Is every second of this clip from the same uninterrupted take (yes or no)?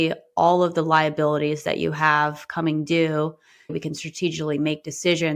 no